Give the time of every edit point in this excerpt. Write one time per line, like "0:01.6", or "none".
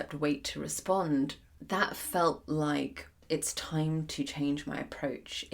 0:01.5
0:03.2